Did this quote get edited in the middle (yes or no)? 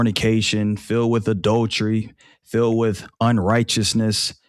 no